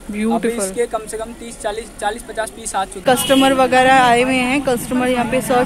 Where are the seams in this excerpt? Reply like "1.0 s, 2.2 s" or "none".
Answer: 3.0 s